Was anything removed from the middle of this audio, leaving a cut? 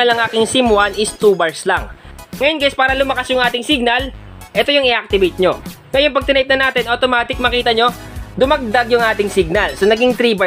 yes; 2 cuts; at 2.0 s, 5.7 s

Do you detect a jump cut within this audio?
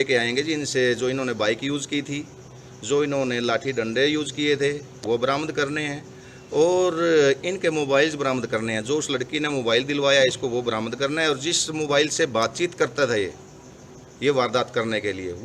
no; 0 cuts

